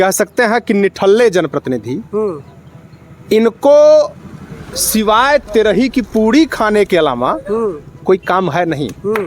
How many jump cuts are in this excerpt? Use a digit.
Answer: 0